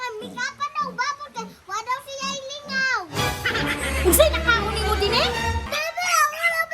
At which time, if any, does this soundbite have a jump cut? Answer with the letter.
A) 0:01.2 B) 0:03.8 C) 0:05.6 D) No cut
C